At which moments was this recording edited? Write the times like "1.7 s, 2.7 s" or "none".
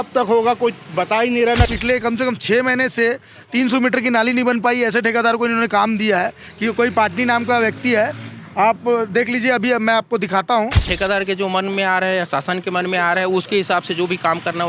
1.7 s, 10.9 s

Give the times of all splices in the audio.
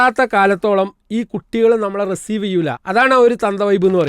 2.8 s

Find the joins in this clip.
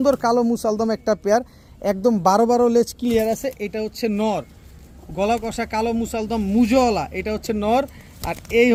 none

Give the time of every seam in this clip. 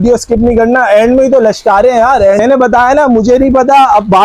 2.4 s

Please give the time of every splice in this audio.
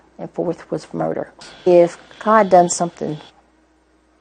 none

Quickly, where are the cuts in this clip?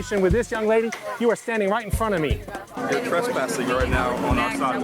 2.7 s

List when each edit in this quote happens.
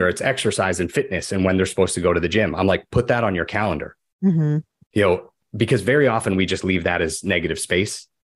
none

